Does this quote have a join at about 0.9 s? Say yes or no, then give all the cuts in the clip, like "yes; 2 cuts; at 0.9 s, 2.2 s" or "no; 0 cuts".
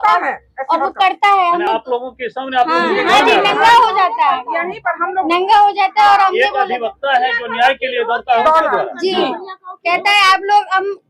no; 0 cuts